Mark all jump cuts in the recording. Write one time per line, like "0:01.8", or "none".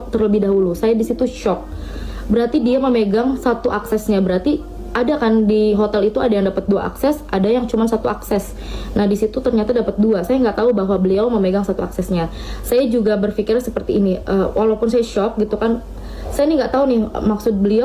none